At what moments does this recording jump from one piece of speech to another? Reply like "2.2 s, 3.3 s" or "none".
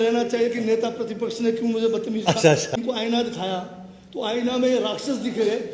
2.7 s